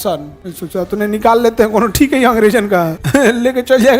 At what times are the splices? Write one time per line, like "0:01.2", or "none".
0:03.0